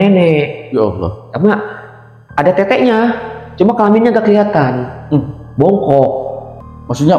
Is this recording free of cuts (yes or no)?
yes